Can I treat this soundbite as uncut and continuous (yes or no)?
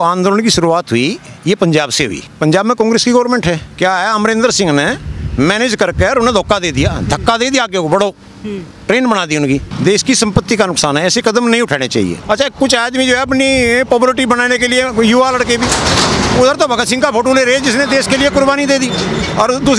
no